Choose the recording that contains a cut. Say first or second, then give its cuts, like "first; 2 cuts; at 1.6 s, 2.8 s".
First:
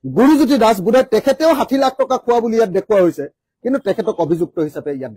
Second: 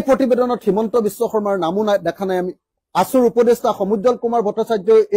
second; 1 cut; at 2.7 s